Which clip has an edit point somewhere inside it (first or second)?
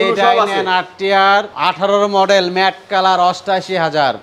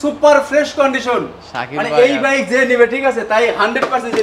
first